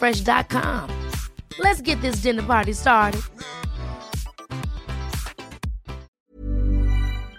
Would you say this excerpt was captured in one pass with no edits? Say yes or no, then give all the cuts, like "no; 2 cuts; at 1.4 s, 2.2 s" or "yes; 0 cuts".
no; 1 cut; at 6.2 s